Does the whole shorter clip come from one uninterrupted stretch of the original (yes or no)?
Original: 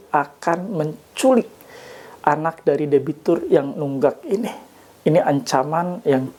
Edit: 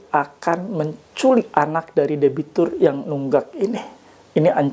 no